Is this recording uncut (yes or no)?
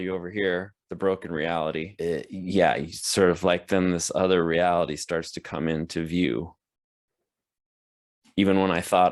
yes